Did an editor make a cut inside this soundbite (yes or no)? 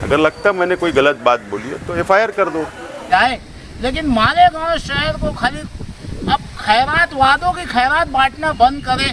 yes